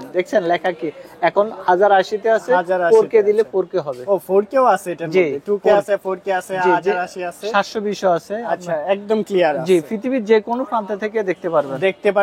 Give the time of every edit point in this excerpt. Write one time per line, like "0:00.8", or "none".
none